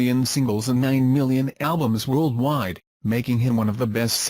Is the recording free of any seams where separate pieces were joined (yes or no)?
no